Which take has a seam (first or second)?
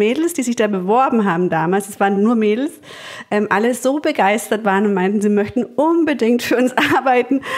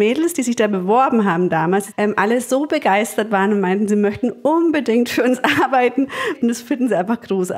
second